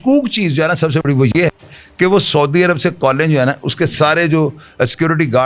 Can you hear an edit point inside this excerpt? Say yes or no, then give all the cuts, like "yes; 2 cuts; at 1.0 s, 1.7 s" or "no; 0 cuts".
no; 0 cuts